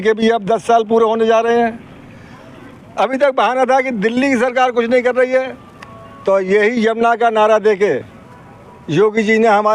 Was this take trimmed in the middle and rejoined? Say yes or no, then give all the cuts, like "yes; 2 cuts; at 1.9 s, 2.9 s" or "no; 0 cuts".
no; 0 cuts